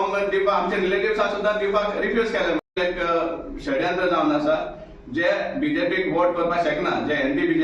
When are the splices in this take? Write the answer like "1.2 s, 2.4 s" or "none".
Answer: 2.7 s